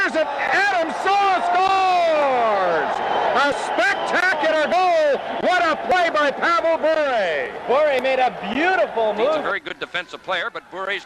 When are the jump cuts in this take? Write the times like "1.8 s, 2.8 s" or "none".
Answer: 9.4 s